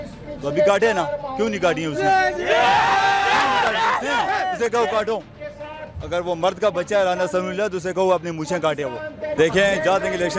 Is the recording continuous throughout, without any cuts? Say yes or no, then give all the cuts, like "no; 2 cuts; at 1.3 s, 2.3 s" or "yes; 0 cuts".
no; 1 cut; at 9.3 s